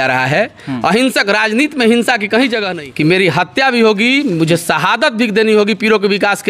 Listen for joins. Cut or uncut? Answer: cut